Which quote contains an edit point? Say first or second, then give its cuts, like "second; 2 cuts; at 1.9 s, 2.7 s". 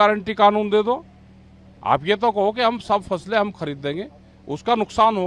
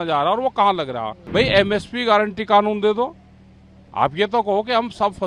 second; 1 cut; at 1.2 s